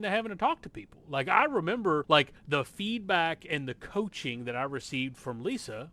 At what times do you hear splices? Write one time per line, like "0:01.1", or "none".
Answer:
0:02.0